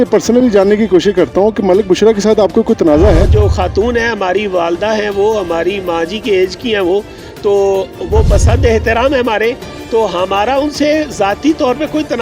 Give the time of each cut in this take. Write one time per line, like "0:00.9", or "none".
0:03.3